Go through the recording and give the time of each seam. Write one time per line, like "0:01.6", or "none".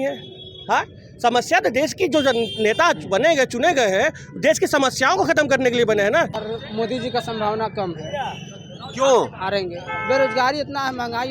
0:06.4